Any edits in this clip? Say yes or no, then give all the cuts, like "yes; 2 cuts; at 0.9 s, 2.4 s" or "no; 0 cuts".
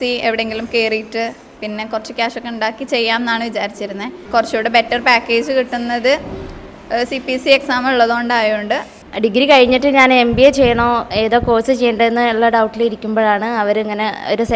yes; 2 cuts; at 4.2 s, 9.0 s